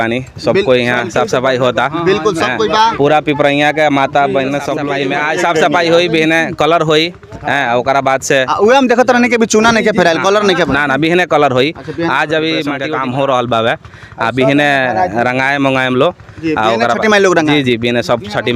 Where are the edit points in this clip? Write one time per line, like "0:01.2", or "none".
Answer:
0:04.8
0:12.9